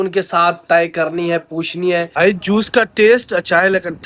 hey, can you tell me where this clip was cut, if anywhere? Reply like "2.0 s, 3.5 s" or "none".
2.1 s